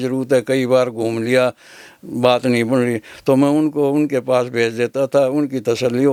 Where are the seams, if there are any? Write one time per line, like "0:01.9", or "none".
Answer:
none